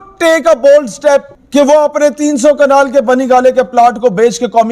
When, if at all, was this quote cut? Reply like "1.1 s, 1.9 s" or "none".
1.4 s